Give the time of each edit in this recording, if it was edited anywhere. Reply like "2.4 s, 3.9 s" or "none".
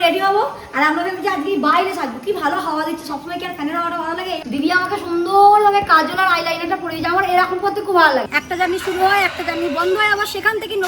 4.4 s, 8.4 s